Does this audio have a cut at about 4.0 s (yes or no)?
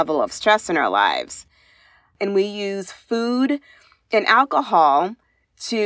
no